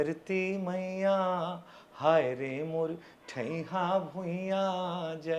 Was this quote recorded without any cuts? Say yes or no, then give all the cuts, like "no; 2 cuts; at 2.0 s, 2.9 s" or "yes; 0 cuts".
yes; 0 cuts